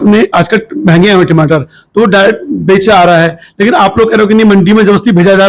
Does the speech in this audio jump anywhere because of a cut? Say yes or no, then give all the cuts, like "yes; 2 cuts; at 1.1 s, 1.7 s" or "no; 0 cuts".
no; 0 cuts